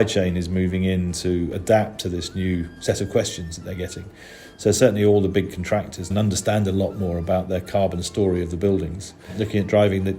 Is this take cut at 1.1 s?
no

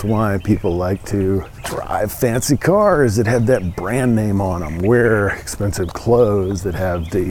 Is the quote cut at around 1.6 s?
yes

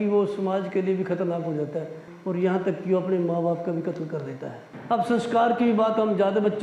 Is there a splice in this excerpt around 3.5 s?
no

